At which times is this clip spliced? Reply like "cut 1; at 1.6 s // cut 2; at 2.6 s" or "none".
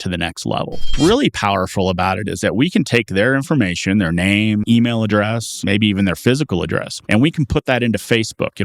cut 1; at 0.9 s